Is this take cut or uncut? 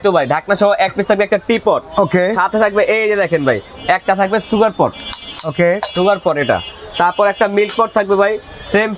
uncut